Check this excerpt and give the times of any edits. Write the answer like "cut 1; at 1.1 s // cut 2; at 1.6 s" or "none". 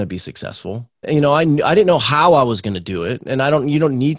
cut 1; at 1.1 s